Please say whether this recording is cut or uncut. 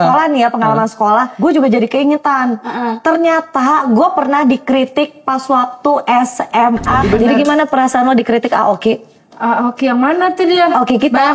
cut